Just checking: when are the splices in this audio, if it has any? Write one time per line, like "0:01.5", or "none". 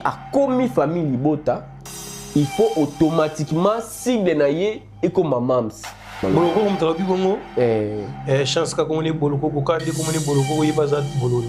0:06.2